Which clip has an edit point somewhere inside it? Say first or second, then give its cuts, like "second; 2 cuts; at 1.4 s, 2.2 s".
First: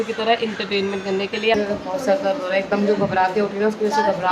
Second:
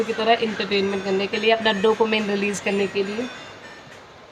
first; 1 cut; at 1.6 s